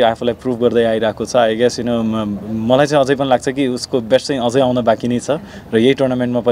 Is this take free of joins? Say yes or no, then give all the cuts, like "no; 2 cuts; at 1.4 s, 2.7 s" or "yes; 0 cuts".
yes; 0 cuts